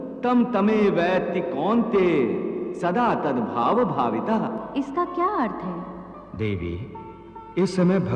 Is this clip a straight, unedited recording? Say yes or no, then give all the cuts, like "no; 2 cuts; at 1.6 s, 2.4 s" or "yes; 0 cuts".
no; 1 cut; at 4.6 s